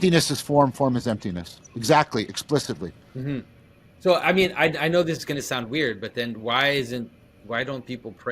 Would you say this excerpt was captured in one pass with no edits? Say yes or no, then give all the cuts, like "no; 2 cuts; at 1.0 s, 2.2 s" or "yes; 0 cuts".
no; 1 cut; at 3.9 s